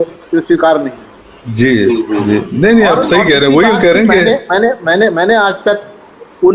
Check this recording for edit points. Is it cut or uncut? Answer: uncut